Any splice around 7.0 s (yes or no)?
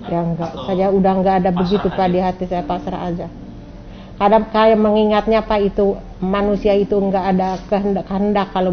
no